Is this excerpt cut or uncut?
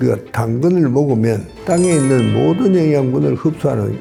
uncut